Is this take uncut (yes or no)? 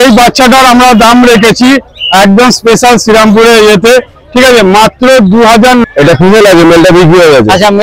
no